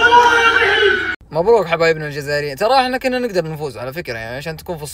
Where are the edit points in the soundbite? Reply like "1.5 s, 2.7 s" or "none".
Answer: 1.1 s